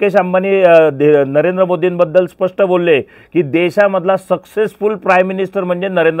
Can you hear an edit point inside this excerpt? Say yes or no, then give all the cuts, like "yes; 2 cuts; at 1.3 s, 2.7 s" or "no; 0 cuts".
no; 0 cuts